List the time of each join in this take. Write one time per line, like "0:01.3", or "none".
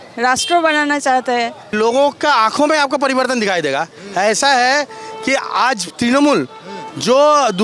0:01.7